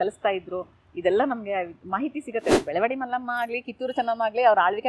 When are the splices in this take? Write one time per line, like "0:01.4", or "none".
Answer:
0:02.6